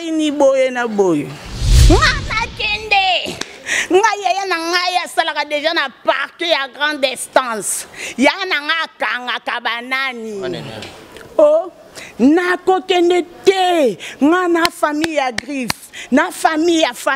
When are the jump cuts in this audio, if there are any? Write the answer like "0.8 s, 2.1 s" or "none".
1.7 s